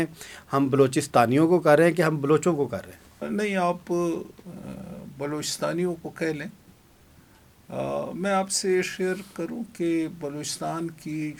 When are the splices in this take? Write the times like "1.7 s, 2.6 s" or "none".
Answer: none